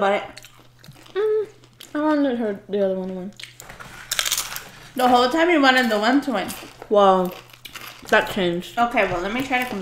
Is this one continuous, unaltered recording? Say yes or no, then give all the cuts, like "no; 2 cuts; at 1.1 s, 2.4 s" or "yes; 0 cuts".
yes; 0 cuts